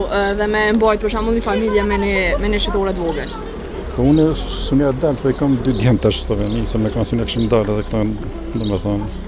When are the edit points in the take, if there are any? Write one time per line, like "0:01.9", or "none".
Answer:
none